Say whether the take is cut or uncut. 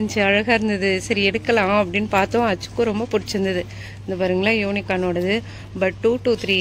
uncut